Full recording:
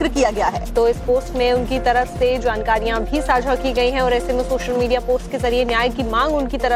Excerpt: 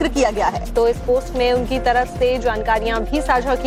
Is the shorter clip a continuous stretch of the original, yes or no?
yes